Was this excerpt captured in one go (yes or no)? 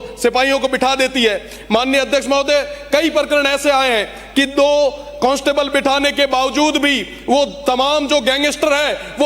yes